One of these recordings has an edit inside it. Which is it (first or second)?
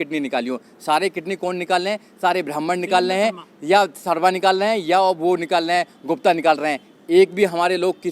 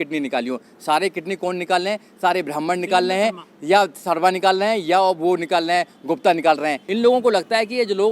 second